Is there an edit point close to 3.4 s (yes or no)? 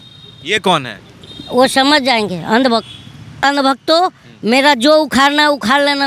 yes